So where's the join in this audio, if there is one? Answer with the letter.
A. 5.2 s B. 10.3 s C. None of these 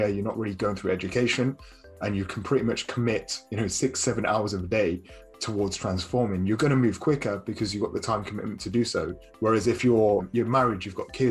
B